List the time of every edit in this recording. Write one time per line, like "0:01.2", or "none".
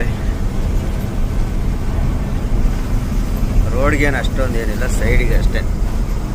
none